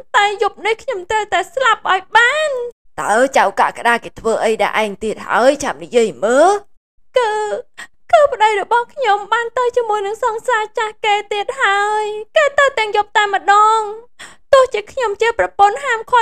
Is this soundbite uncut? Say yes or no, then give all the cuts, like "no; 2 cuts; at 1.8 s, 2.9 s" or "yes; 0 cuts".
yes; 0 cuts